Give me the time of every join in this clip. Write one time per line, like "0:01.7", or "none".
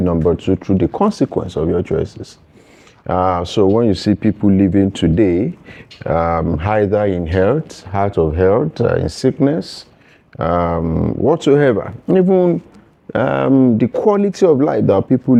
none